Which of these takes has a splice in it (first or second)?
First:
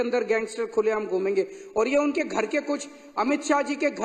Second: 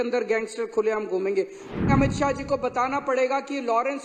second